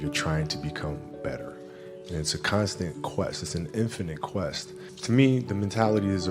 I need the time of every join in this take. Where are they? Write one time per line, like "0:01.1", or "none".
0:04.9